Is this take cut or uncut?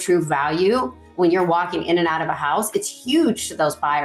uncut